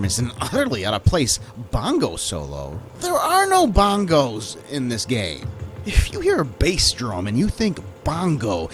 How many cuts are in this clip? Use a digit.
0